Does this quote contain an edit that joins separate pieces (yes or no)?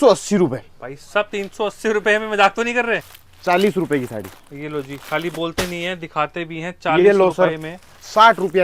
yes